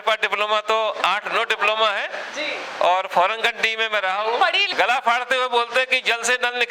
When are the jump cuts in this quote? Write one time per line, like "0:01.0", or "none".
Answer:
0:04.6